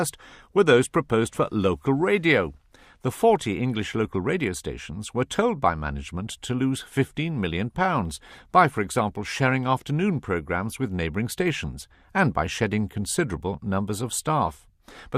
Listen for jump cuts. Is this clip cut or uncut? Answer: uncut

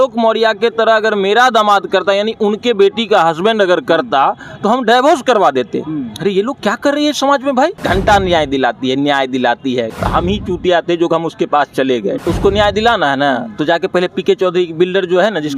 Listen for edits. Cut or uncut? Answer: cut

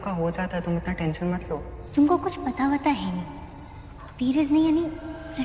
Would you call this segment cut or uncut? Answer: uncut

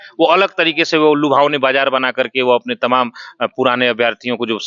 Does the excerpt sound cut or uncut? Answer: uncut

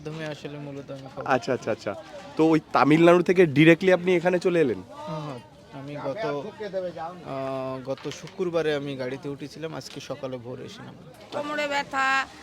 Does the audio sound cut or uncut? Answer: cut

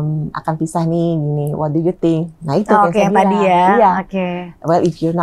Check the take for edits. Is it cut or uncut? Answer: uncut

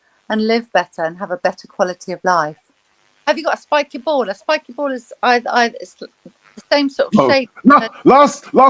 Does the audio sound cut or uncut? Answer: cut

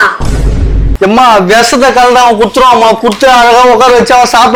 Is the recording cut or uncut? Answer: uncut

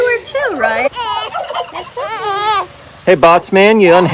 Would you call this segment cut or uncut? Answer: cut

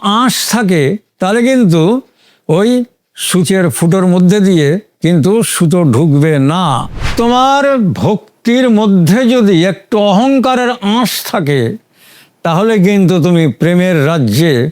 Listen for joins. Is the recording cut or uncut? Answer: cut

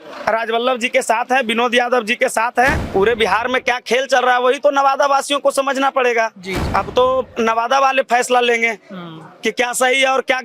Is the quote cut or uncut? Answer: cut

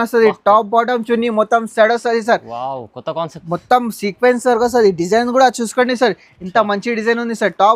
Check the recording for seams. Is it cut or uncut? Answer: uncut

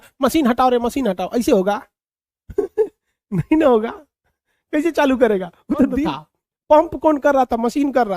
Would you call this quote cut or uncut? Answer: cut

